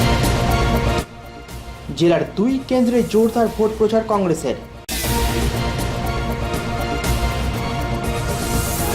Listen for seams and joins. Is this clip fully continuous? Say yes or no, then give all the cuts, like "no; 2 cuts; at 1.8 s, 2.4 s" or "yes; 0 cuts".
no; 1 cut; at 1.2 s